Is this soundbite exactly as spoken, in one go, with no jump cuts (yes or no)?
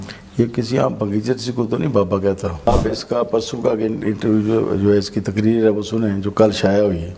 no